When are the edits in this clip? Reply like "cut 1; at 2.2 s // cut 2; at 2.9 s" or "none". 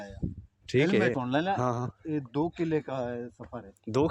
cut 1; at 1.1 s